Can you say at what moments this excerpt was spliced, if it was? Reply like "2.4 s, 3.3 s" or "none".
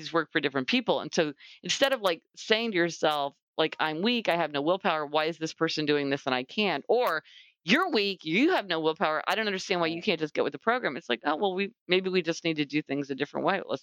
none